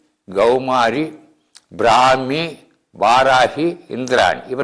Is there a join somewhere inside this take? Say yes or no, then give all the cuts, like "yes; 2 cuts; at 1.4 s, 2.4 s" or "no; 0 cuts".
no; 0 cuts